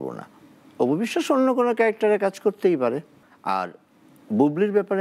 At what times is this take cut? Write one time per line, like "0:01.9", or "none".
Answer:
none